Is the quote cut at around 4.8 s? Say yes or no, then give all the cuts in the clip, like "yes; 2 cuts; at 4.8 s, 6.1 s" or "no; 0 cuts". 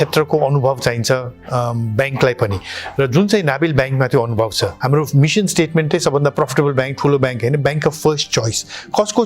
yes; 1 cut; at 4.8 s